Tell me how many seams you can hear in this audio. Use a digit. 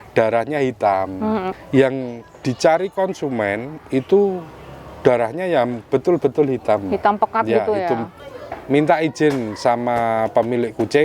2